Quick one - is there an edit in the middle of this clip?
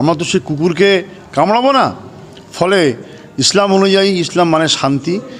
no; 0 cuts

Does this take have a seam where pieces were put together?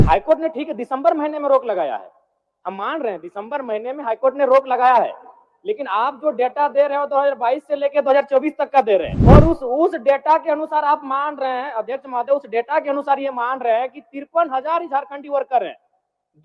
yes; 1 cut; at 9.1 s

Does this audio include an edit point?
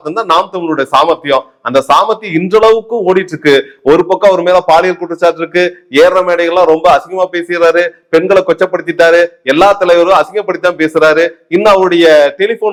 no; 0 cuts

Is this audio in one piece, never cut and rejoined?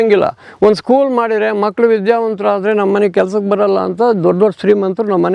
yes; 0 cuts

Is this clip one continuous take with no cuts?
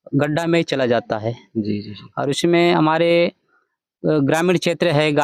yes; 0 cuts

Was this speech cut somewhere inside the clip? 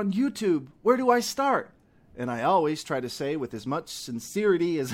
no; 0 cuts

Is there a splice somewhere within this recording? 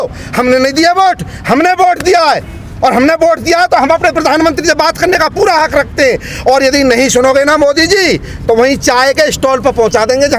no; 0 cuts

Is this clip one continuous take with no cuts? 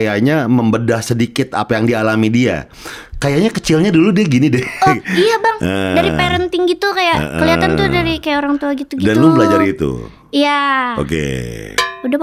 yes; 0 cuts

